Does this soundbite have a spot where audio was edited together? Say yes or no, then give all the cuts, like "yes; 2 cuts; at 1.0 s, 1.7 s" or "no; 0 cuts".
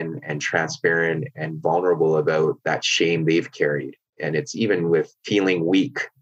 yes; 3 cuts; at 2.6 s, 4.1 s, 5.2 s